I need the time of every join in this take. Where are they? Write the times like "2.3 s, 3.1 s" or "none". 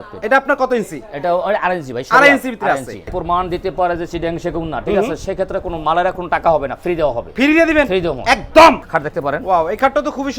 3.1 s, 8.8 s